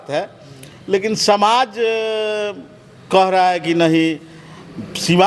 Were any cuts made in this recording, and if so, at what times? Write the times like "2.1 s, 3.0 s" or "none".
none